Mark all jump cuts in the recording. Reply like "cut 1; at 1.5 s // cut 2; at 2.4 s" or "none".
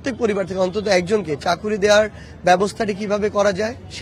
none